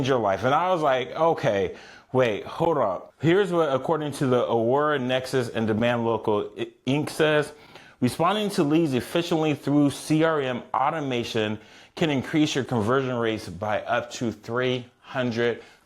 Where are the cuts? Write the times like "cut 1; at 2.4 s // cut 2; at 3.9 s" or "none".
cut 1; at 3.0 s

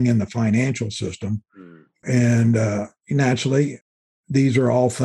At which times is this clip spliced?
cut 1; at 2.0 s

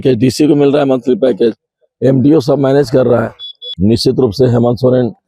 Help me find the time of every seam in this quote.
cut 1; at 3.7 s

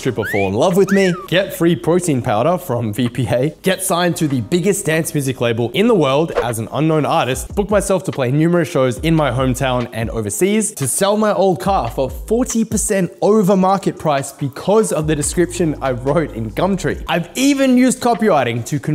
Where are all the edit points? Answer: cut 1; at 1.2 s // cut 2; at 3.5 s // cut 3; at 5.7 s // cut 4; at 7.4 s // cut 5; at 10.7 s // cut 6; at 17.0 s

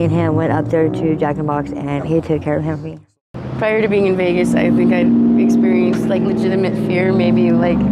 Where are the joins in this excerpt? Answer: cut 1; at 2.0 s // cut 2; at 3.0 s

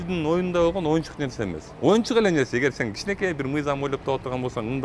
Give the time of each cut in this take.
none

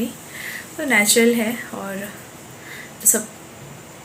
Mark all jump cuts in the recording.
none

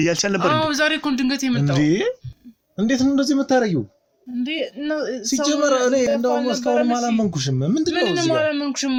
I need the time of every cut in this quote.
none

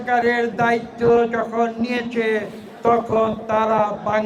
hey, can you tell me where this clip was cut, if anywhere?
none

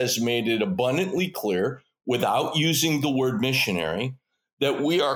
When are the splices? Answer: none

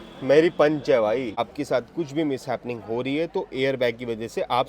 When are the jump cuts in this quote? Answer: cut 1; at 1.4 s

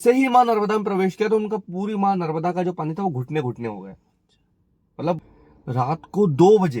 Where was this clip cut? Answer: cut 1; at 5.2 s

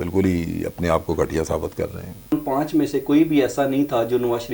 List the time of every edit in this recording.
cut 1; at 2.3 s

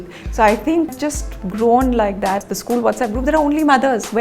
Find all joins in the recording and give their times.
cut 1; at 0.9 s // cut 2; at 2.4 s

